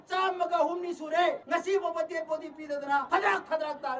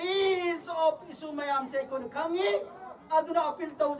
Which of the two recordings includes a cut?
first; 1 cut; at 3.1 s

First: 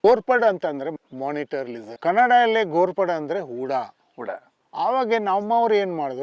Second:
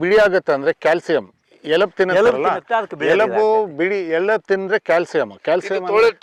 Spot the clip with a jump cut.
first; 1 cut; at 0.9 s

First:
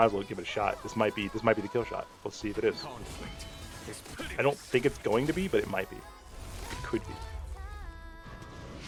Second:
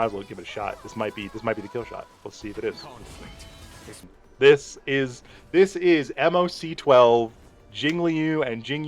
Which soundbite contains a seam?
second; 1 cut; at 4.1 s

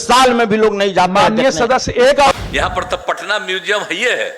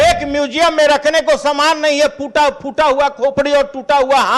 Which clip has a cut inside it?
first; 1 cut; at 2.3 s

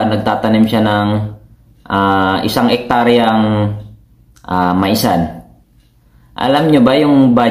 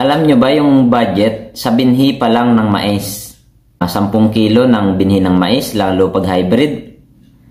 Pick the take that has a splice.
second; 1 cut; at 3.9 s

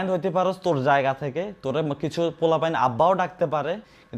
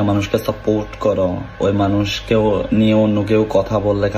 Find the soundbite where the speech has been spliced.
second; 1 cut; at 1.5 s

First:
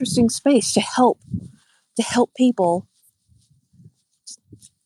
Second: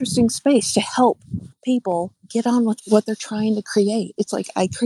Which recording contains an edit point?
second; 2 cuts; at 1.6 s, 2.6 s

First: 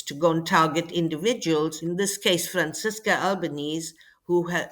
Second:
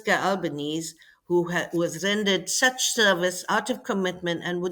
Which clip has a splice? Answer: first; 1 cut; at 1.8 s

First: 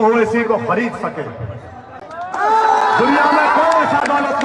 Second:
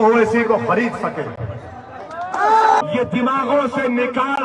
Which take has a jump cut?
second; 1 cut; at 2.8 s

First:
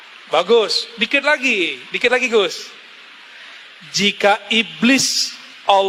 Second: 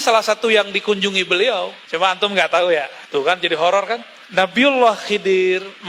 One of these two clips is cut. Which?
second; 3 cuts; at 1.8 s, 3.0 s, 4.1 s

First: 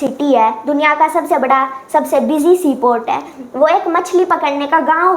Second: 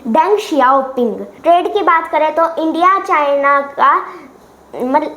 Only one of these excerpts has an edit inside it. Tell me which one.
second; 1 cut; at 1.3 s

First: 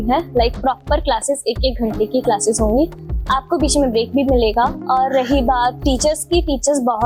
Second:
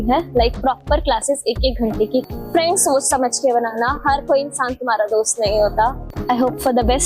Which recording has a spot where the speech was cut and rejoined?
second; 2 cuts; at 2.2 s, 6.1 s

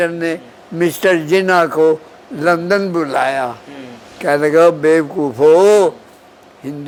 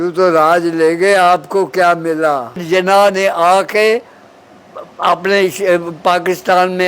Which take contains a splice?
second; 1 cut; at 2.6 s

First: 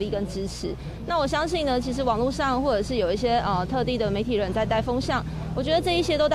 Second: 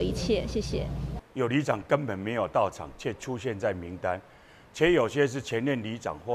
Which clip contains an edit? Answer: second; 1 cut; at 1.1 s

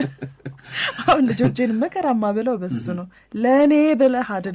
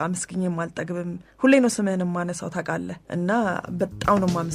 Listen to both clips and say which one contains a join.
second; 1 cut; at 3.0 s

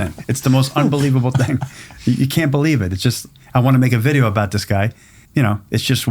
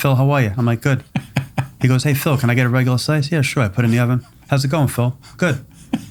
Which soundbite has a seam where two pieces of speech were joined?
first; 1 cut; at 5.2 s

